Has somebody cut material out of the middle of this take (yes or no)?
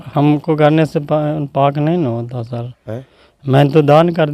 no